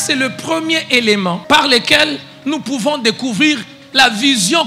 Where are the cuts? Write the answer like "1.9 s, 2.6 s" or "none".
1.4 s